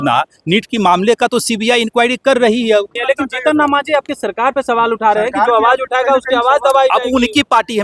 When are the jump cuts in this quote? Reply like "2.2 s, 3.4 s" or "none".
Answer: 3.0 s